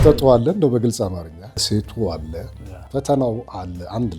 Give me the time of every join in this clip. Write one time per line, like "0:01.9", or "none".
0:01.6